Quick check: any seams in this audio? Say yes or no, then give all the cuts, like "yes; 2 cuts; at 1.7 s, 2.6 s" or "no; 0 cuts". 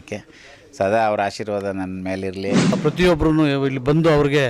yes; 1 cut; at 2.8 s